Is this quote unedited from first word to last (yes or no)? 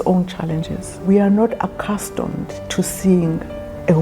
no